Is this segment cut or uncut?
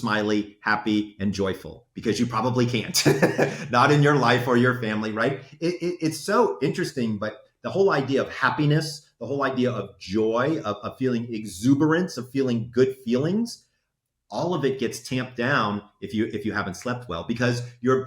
uncut